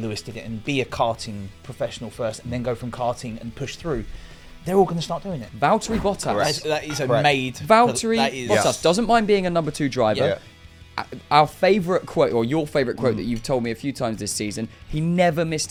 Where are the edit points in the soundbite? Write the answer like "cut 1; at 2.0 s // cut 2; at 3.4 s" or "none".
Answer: cut 1; at 5.4 s

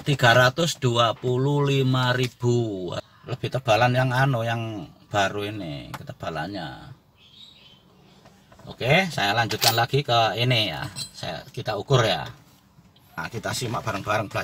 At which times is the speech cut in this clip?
cut 1; at 3.1 s

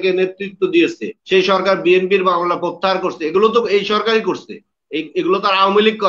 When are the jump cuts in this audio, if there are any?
cut 1; at 1.1 s

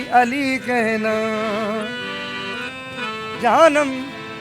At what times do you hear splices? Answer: cut 1; at 3.4 s

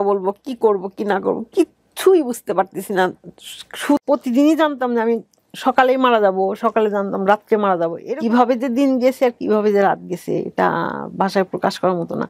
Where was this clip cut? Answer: cut 1; at 4.0 s // cut 2; at 8.0 s

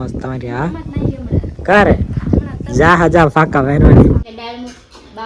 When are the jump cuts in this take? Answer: cut 1; at 4.3 s

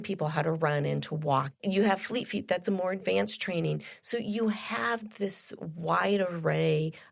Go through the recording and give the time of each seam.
cut 1; at 1.5 s

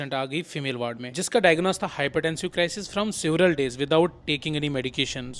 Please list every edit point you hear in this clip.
none

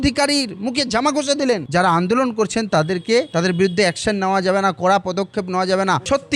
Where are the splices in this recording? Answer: cut 1; at 1.7 s

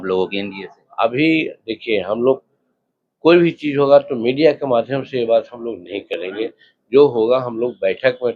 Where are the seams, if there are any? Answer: none

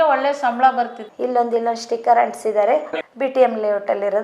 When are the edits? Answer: cut 1; at 1.0 s // cut 2; at 2.9 s

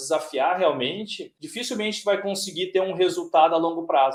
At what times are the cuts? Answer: none

